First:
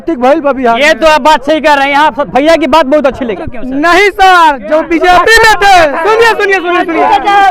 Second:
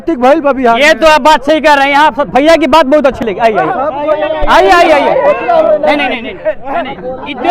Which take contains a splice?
first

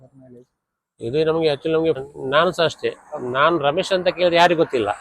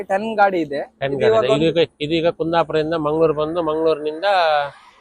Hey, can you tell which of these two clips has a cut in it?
first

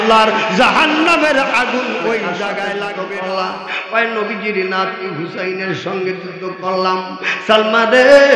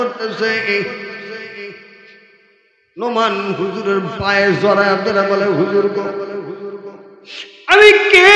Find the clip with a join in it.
first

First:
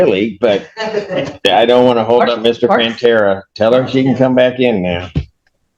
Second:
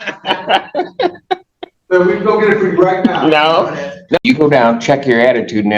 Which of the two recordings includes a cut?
second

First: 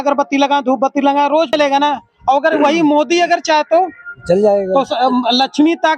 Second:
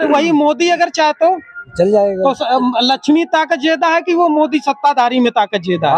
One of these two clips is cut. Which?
first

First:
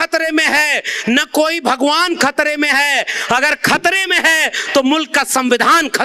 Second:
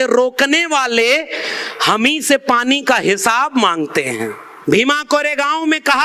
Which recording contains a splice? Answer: second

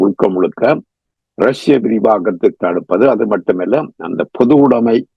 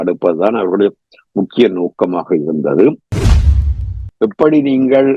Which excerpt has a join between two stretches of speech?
second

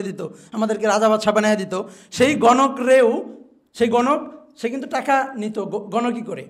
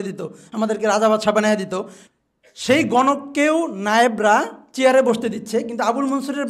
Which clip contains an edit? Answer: second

